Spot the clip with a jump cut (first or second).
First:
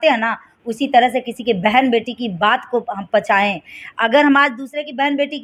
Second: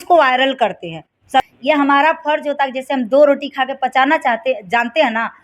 second